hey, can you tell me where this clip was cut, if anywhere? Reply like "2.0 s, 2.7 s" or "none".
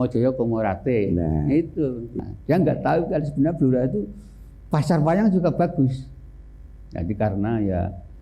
2.1 s

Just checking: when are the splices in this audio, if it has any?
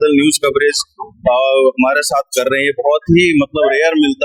none

